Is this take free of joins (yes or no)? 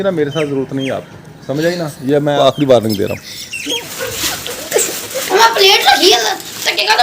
no